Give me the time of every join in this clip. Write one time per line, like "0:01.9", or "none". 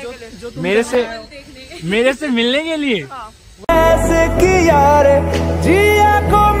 none